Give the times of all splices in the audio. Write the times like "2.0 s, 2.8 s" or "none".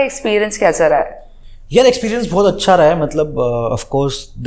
none